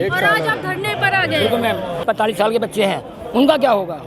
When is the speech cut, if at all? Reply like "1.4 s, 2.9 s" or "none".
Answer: 2.0 s